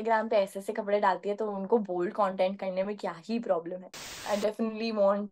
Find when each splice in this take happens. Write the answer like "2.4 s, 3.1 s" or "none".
4.1 s